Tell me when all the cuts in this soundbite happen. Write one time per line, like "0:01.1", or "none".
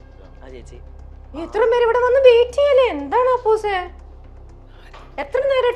none